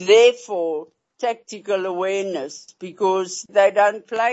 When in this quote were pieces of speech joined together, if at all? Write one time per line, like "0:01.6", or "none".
0:03.3